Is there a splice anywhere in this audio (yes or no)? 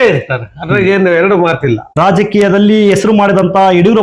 yes